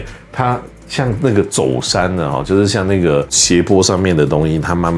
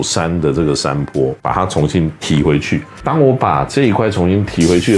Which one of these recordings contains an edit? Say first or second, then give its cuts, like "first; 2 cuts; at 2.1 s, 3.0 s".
second; 2 cuts; at 1.4 s, 2.9 s